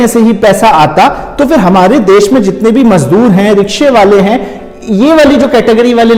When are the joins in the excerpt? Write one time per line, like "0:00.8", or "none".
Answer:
none